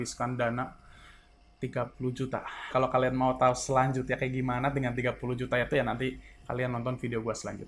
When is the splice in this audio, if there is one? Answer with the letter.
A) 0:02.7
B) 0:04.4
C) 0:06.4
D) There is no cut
A